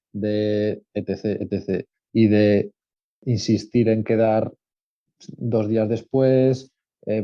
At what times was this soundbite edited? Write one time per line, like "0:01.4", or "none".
0:03.2